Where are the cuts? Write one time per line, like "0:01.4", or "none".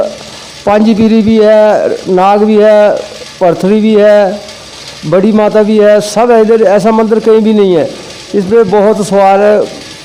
none